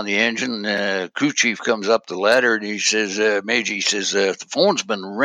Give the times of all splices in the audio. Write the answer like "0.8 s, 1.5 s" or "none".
none